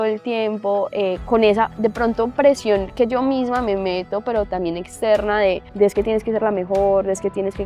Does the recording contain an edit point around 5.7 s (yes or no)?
yes